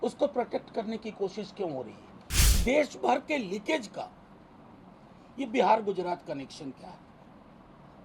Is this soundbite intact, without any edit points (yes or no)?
no